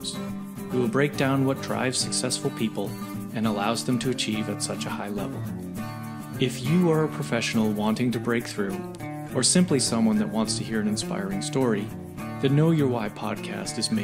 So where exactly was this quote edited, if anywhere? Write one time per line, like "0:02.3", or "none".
none